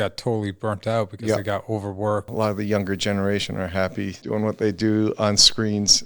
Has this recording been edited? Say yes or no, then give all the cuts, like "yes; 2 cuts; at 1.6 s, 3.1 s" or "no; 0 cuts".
yes; 2 cuts; at 2.3 s, 4.2 s